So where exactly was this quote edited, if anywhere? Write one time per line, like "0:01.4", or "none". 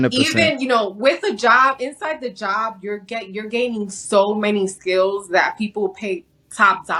none